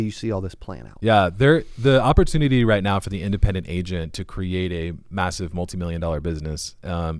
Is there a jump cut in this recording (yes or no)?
no